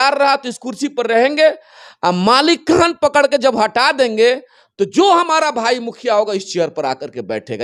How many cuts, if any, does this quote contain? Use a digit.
0